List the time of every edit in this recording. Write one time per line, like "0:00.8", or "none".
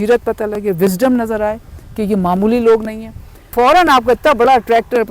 0:03.5